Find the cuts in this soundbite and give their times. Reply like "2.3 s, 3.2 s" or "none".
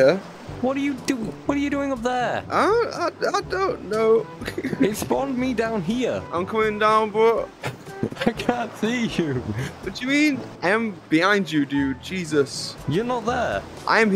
6.3 s